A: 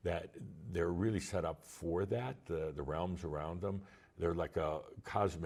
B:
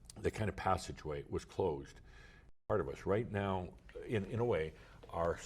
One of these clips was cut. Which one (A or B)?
B